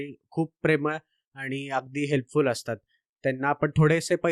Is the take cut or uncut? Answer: uncut